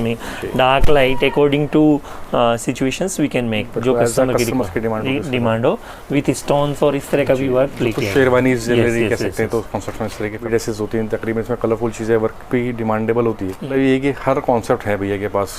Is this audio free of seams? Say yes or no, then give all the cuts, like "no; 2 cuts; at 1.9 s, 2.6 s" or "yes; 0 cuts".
no; 3 cuts; at 5.9 s, 10.5 s, 13.7 s